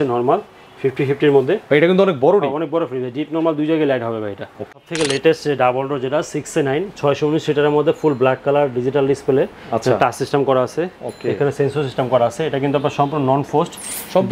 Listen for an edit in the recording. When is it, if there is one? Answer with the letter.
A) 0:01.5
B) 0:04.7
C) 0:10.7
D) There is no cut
B